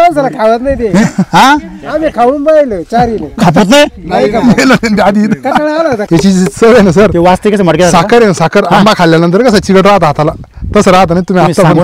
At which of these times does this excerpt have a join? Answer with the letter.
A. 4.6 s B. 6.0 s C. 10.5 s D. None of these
B